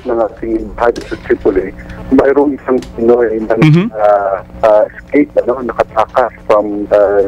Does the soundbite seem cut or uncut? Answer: cut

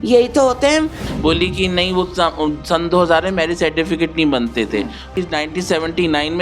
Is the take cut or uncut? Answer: cut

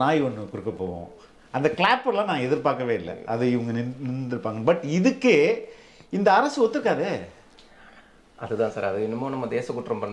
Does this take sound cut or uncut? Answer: uncut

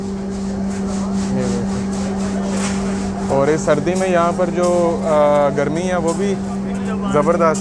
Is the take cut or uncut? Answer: uncut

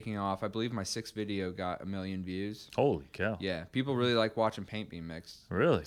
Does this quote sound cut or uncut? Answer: uncut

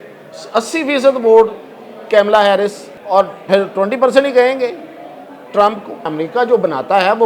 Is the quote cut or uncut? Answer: cut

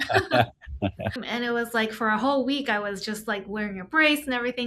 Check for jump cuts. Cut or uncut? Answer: cut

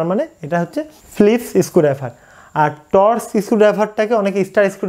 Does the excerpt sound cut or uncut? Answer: cut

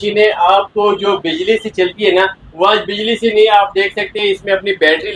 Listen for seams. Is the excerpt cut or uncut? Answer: uncut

